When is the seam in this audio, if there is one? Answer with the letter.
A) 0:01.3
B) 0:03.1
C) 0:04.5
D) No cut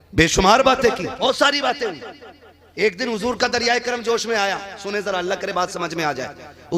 A